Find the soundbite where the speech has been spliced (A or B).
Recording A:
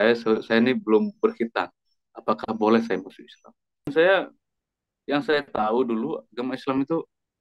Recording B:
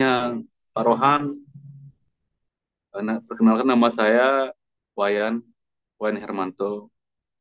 A